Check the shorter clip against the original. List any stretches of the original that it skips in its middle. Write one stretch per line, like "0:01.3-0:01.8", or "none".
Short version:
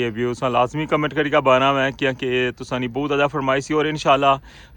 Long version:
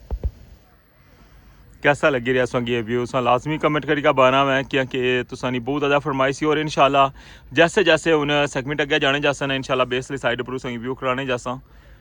none